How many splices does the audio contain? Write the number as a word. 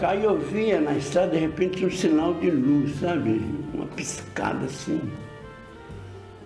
zero